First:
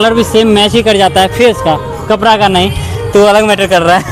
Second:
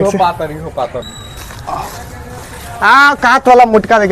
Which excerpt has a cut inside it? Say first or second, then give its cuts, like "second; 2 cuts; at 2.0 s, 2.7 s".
second; 1 cut; at 1.0 s